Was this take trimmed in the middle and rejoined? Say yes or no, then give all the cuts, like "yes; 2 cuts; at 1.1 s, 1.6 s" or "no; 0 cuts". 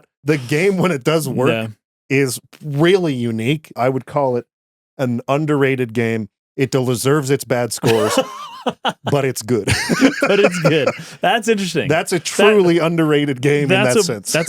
yes; 2 cuts; at 3.8 s, 6.4 s